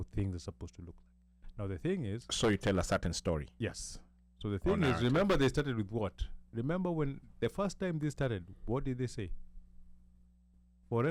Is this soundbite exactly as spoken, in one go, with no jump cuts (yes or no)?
yes